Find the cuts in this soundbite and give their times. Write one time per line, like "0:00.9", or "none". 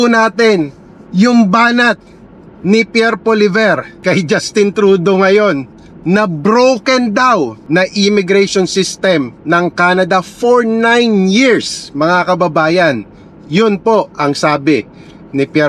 0:03.9
0:07.6